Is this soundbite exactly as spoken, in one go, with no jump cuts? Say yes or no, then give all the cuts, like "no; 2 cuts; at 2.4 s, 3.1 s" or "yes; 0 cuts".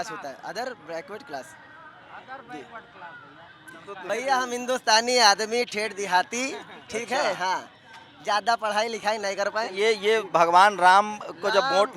yes; 0 cuts